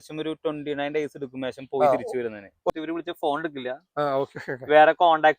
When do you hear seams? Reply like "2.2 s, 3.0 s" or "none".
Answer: 2.7 s